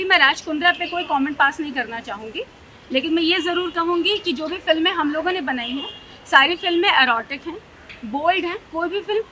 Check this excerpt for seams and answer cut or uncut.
uncut